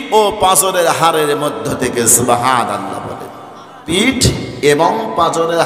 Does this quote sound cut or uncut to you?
cut